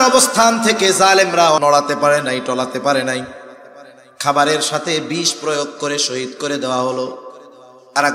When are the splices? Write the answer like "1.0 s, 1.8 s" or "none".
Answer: 1.6 s